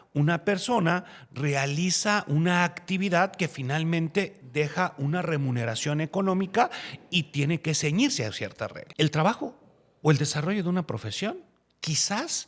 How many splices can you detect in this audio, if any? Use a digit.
1